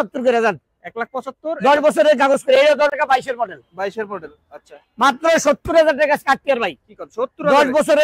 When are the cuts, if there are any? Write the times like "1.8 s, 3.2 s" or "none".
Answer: 2.9 s